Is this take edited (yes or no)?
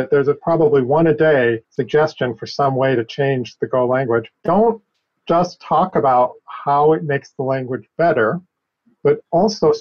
yes